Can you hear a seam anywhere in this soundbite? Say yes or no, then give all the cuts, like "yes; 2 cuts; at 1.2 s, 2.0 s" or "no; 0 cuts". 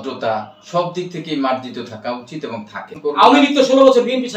yes; 1 cut; at 2.9 s